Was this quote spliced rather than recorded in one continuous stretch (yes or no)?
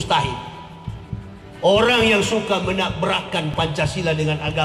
no